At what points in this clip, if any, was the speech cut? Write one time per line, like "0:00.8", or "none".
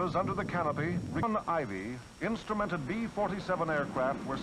0:01.2